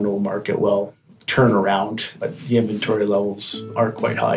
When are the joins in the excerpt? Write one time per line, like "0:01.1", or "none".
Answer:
none